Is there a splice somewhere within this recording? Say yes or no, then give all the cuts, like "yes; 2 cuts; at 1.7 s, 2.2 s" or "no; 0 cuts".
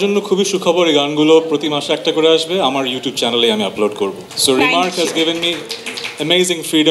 yes; 1 cut; at 4.3 s